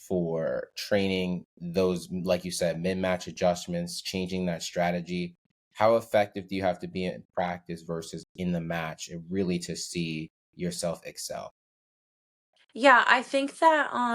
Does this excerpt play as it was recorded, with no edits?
yes; 0 cuts

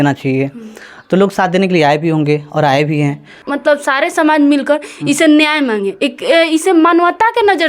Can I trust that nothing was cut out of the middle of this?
no; 1 cut; at 3.4 s

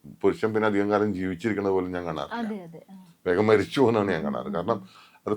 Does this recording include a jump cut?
no; 0 cuts

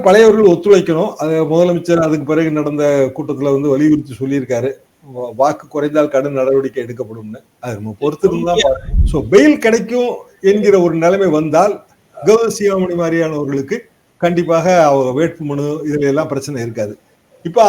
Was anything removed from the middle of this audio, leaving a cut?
yes; 1 cut; at 8.9 s

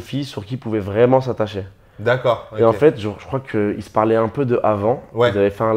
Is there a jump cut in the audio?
no; 0 cuts

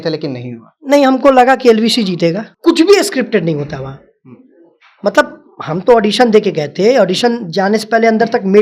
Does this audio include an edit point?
yes; 1 cut; at 2.5 s

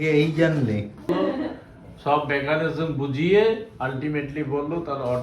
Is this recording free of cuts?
no; 1 cut; at 1.1 s

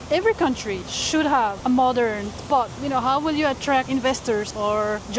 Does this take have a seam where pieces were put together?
yes; 4 cuts; at 0.9 s, 1.6 s, 2.8 s, 4.2 s

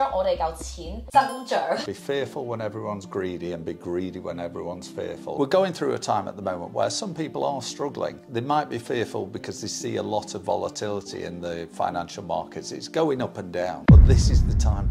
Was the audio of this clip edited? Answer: yes; 3 cuts; at 1.9 s, 5.3 s, 8.2 s

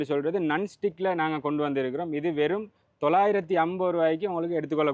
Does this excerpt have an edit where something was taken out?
no; 0 cuts

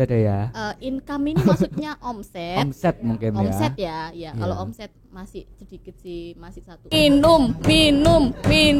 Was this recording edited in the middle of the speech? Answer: yes; 1 cut; at 6.9 s

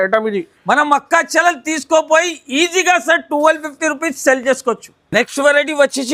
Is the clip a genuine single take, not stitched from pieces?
yes; 0 cuts

